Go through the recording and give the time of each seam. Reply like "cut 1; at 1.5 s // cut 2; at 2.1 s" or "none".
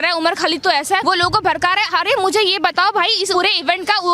cut 1; at 1.0 s // cut 2; at 3.3 s